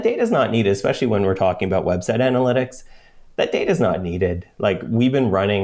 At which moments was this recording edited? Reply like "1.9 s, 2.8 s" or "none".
none

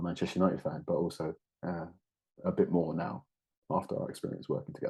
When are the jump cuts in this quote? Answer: none

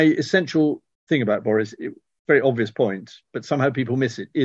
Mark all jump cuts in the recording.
0.9 s

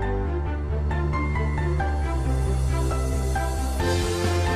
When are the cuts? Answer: none

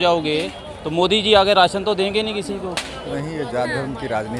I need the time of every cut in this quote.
2.9 s

